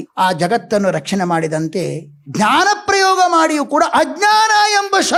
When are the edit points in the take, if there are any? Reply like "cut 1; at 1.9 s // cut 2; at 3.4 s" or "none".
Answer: none